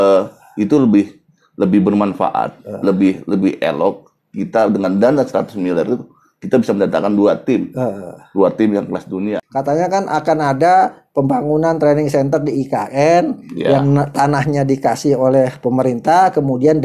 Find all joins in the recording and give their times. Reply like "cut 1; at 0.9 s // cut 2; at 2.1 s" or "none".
cut 1; at 9.4 s